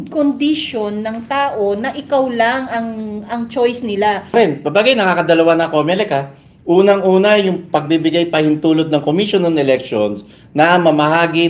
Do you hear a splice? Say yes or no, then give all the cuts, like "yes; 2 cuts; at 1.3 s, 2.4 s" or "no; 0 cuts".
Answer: yes; 1 cut; at 4.3 s